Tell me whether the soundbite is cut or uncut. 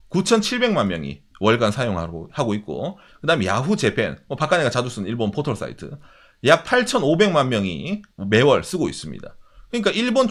uncut